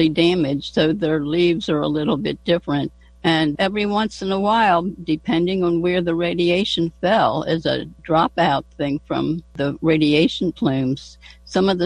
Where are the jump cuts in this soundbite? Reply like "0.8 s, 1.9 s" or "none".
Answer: 3.5 s, 7.9 s, 9.6 s